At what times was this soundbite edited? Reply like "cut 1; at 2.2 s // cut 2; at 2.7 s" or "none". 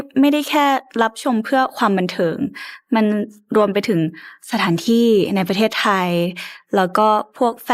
none